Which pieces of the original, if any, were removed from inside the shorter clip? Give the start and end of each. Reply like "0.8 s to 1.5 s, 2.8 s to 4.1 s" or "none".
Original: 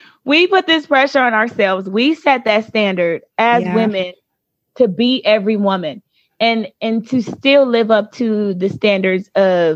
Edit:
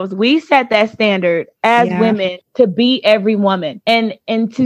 4.1 s to 4.6 s, 5.9 s to 6.3 s